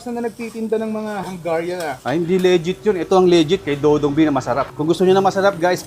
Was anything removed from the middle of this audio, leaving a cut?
yes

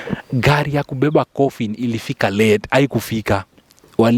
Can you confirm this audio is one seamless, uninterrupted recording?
yes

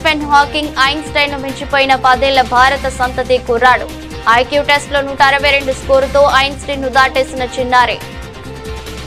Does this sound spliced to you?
yes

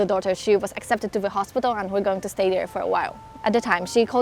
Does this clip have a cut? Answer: yes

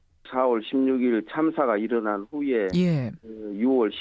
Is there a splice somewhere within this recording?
no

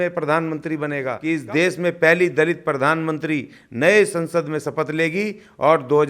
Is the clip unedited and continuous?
no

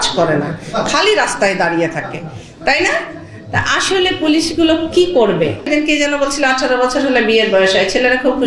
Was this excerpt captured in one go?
no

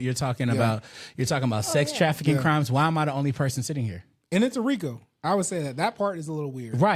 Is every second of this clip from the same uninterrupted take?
yes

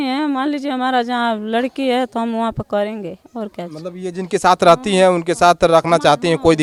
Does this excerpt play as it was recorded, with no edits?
yes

